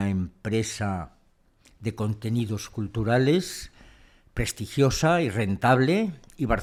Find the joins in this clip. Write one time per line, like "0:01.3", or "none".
none